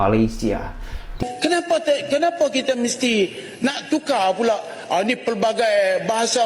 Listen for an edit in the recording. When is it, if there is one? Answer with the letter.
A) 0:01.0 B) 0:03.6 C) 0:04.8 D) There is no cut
A